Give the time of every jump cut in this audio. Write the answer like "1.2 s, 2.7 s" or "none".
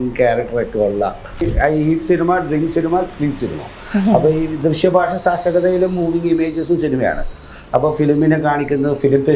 1.5 s